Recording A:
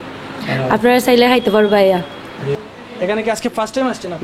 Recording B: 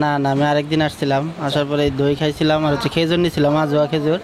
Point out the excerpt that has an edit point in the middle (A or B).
A